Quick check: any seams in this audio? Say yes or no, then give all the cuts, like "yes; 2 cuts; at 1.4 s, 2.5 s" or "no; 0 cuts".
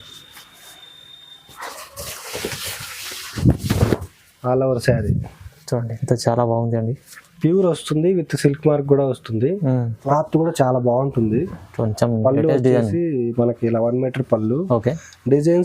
yes; 1 cut; at 10.0 s